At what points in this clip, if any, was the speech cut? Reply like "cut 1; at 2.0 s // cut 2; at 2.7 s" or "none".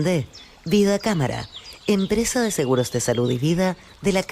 cut 1; at 3.4 s